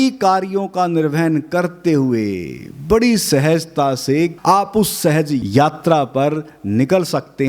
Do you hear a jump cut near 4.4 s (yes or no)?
yes